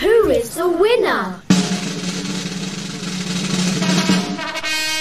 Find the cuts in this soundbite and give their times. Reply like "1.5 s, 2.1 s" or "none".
1.4 s